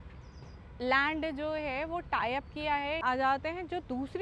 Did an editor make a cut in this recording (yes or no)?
yes